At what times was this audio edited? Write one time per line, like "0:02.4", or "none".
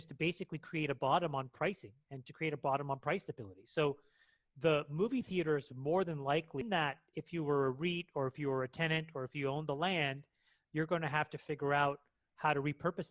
0:06.6

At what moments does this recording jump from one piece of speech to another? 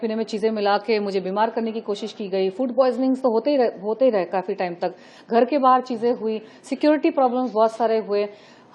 none

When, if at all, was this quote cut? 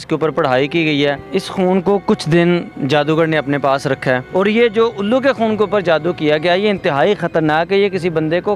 0:01.2
0:04.2

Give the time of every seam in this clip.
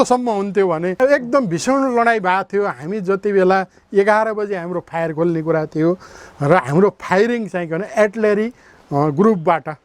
0:01.0

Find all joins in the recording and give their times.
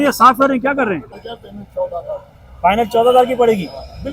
0:01.2

